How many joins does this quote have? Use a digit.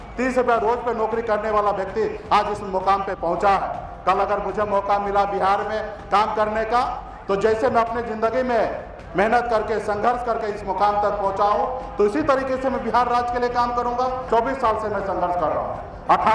1